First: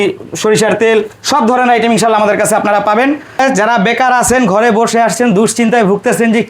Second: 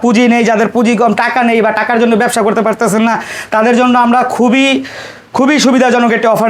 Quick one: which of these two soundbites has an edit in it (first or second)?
first